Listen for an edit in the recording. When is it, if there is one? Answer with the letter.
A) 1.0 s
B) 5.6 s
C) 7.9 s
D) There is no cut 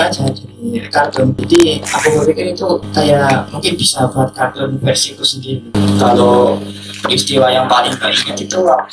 B